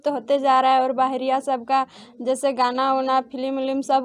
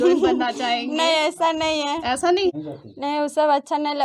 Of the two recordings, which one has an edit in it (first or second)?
second